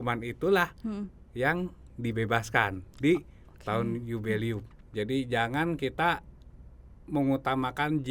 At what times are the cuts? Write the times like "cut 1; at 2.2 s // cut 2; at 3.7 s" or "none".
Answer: cut 1; at 4.7 s